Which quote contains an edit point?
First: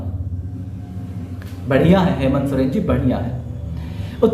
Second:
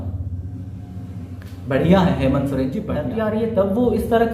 second; 1 cut; at 3.1 s

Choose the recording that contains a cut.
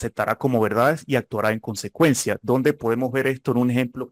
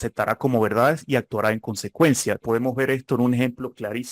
second; 1 cut; at 2.4 s

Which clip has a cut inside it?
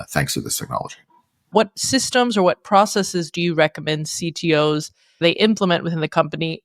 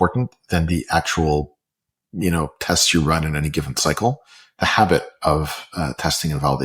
first; 2 cuts; at 1.5 s, 5.2 s

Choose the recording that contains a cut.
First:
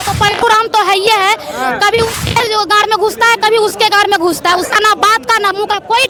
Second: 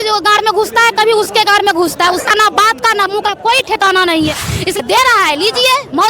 second; 1 cut; at 4.8 s

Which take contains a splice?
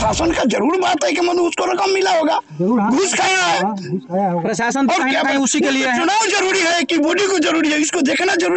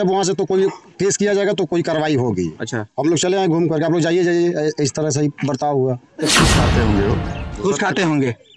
second; 1 cut; at 6.3 s

